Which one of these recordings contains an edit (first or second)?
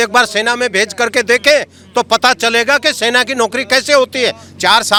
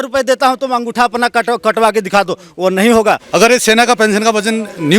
second